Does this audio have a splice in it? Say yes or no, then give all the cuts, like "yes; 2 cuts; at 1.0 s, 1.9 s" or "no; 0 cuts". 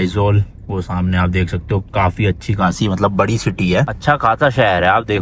yes; 1 cut; at 4.0 s